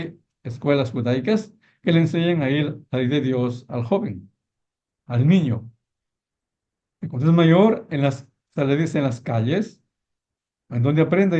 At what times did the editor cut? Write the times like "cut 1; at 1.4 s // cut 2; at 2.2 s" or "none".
none